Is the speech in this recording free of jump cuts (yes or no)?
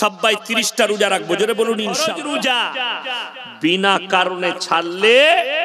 no